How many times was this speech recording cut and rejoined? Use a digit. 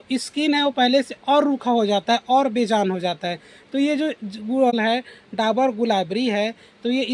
1